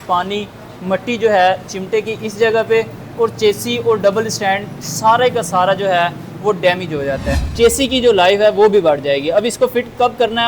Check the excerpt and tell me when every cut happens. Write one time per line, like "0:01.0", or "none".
0:07.4